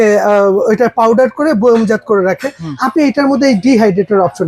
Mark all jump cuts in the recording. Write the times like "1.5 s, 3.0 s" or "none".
none